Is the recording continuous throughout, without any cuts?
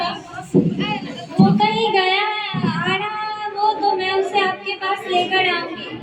yes; 0 cuts

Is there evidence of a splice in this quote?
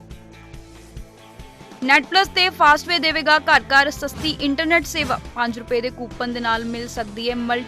yes; 1 cut; at 1.3 s

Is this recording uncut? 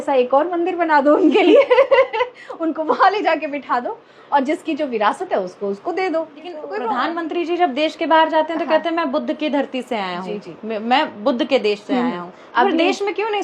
no; 1 cut; at 6.7 s

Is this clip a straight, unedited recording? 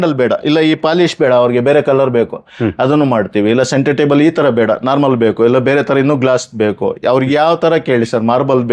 yes; 0 cuts

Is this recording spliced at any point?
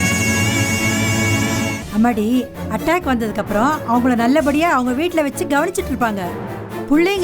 yes; 1 cut; at 1.8 s

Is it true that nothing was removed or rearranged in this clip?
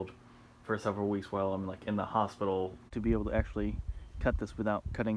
no; 1 cut; at 2.9 s

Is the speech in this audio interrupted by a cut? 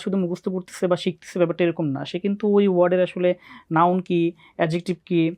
no; 0 cuts

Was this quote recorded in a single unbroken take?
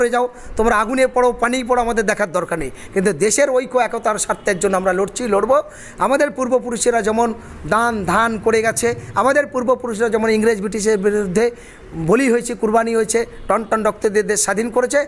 yes; 0 cuts

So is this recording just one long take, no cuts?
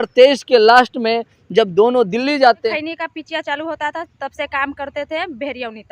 no; 1 cut; at 2.7 s

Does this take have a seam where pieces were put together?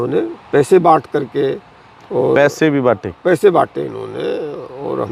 no; 0 cuts

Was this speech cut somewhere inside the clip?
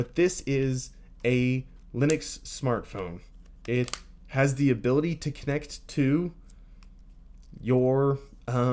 no; 0 cuts

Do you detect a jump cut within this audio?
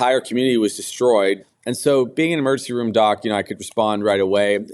yes; 1 cut; at 1.4 s

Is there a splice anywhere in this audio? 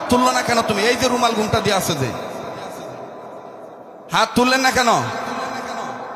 no; 0 cuts

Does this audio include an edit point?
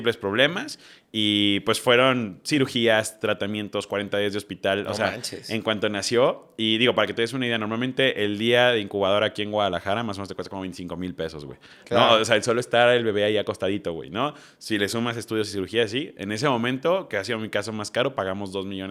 no; 0 cuts

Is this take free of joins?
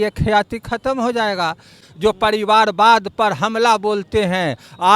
no; 1 cut; at 1.8 s

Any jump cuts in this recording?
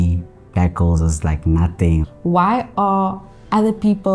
yes; 1 cut; at 2.1 s

